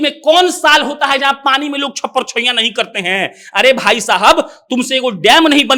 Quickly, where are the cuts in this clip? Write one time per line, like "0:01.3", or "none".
none